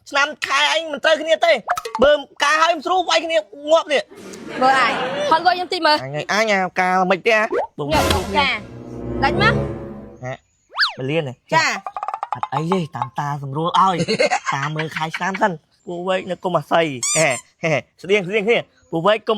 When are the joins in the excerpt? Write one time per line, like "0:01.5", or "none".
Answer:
0:15.7